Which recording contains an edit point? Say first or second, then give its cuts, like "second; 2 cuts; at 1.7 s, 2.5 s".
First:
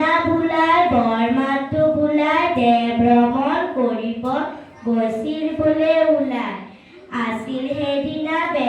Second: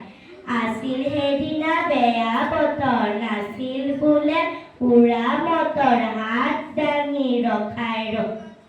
second; 1 cut; at 3.1 s